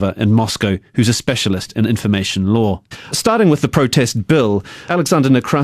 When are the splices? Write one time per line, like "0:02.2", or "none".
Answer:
0:02.8